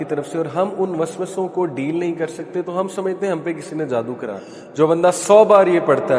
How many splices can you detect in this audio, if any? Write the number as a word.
one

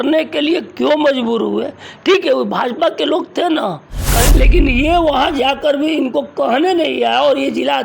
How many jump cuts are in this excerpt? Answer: one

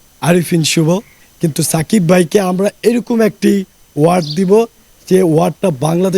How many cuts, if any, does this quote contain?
one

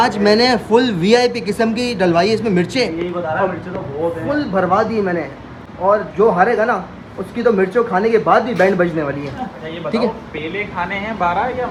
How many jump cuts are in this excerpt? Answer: zero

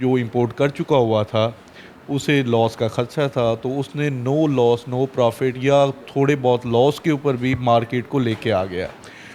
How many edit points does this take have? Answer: zero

